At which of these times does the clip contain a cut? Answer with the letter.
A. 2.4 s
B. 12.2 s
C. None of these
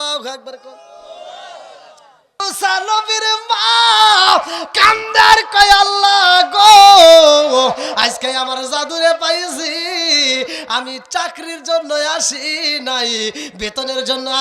A